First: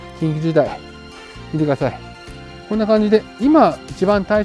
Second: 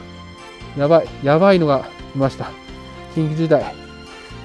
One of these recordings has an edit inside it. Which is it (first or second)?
first